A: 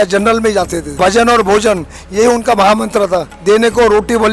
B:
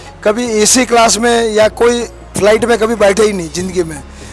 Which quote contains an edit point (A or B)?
A